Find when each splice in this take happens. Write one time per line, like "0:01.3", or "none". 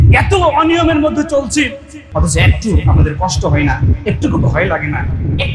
0:02.0